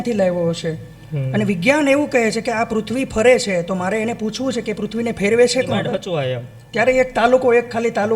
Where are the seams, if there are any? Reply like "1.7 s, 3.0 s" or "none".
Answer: 6.1 s